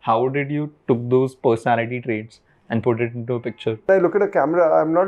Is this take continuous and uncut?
no; 1 cut; at 3.9 s

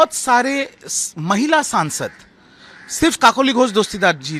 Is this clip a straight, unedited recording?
yes; 0 cuts

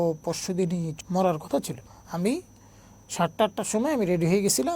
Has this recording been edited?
yes; 2 cuts; at 0.9 s, 1.8 s

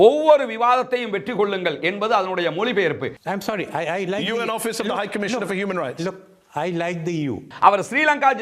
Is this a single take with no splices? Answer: no; 2 cuts; at 3.2 s, 7.5 s

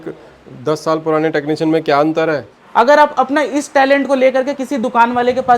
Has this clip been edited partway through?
yes; 1 cut; at 2.5 s

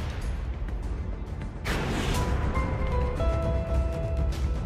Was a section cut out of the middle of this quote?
yes; 1 cut; at 1.6 s

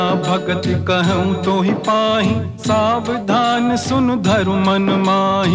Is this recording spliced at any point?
no; 0 cuts

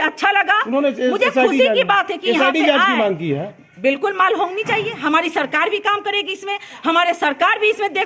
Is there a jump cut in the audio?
no; 0 cuts

